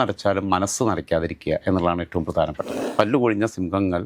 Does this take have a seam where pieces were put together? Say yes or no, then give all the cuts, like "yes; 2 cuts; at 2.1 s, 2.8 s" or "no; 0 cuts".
yes; 1 cut; at 2.7 s